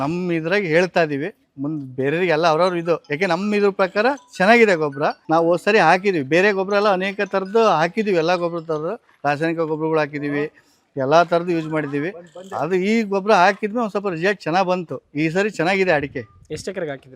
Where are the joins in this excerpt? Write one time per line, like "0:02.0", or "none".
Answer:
none